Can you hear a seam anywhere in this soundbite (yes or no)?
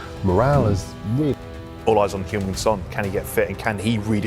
yes